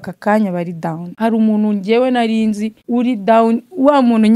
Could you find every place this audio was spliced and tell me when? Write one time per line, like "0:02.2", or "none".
0:01.1
0:02.7